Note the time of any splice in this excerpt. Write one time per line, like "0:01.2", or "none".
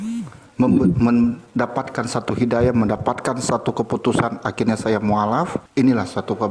0:05.6